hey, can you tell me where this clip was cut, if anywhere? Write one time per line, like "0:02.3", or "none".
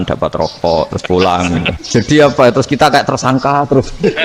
0:01.8